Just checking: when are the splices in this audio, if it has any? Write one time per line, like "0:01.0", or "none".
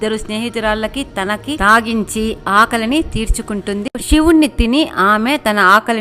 0:04.0